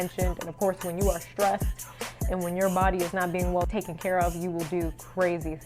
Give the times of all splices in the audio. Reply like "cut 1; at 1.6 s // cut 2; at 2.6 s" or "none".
cut 1; at 3.7 s